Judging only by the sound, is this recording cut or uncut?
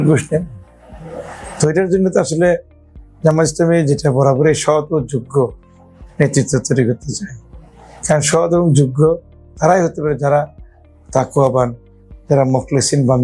uncut